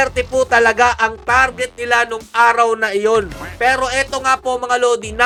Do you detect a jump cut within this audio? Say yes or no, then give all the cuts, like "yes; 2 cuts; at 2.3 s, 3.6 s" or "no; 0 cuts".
no; 0 cuts